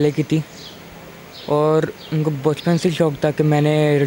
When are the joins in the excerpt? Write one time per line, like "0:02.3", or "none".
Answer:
none